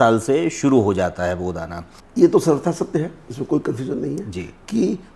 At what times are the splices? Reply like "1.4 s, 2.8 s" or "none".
2.0 s